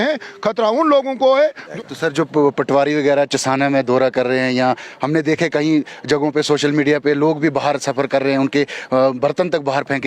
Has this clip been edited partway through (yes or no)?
yes